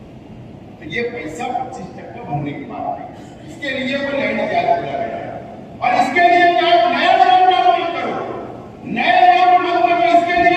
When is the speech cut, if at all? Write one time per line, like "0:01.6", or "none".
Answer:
none